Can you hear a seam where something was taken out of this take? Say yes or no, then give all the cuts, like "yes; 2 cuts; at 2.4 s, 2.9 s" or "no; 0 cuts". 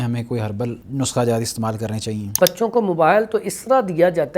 yes; 2 cuts; at 0.8 s, 2.3 s